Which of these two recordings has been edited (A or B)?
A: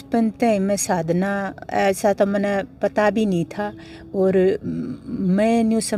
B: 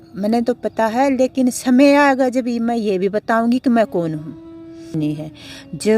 B